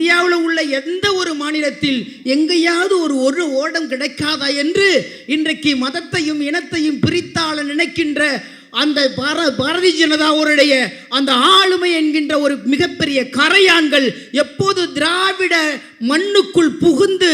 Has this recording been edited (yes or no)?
no